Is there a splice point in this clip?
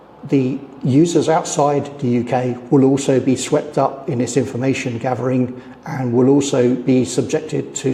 no; 0 cuts

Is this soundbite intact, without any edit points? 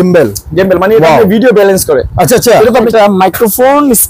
no; 1 cut; at 2.9 s

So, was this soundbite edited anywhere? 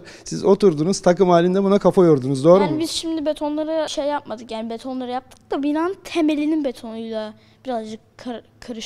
no; 0 cuts

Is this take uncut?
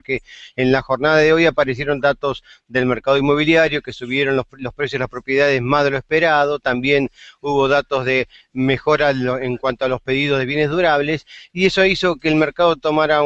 no; 1 cut; at 9.6 s

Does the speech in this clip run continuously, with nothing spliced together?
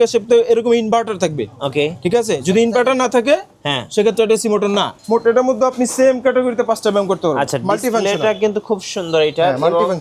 no; 1 cut; at 4.9 s

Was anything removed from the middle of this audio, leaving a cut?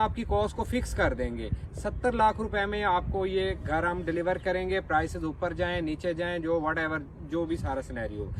no; 0 cuts

